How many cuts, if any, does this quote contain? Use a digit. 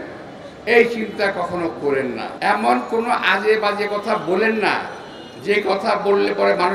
1